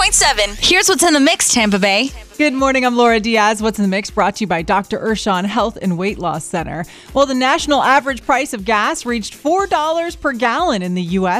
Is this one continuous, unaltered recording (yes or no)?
no